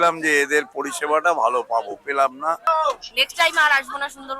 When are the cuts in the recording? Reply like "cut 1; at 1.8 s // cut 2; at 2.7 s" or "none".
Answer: cut 1; at 2.6 s